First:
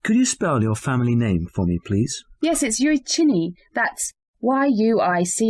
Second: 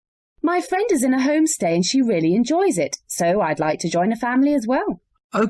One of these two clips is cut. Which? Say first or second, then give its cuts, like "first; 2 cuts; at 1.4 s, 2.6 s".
second; 1 cut; at 1.9 s